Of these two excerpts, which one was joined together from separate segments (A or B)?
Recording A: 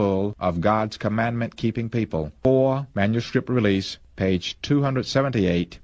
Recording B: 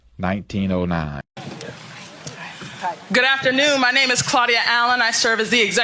B